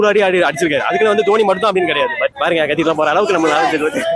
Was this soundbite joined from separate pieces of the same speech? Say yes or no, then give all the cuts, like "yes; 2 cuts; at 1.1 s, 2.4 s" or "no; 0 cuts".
no; 0 cuts